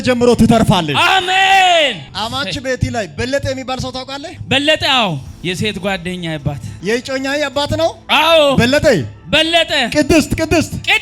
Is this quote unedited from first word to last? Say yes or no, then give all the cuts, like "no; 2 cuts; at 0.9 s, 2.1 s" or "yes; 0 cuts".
no; 2 cuts; at 5.3 s, 6.7 s